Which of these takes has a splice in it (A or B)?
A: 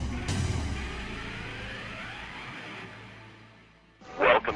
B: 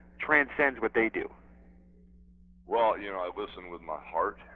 A